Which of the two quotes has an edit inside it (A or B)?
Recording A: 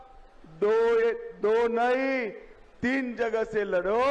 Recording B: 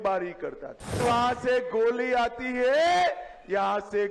B